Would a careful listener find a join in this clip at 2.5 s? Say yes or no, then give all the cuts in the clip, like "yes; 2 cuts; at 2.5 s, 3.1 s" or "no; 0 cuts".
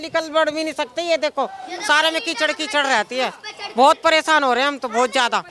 no; 0 cuts